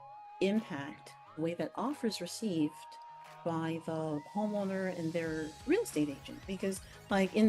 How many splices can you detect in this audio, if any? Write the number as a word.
one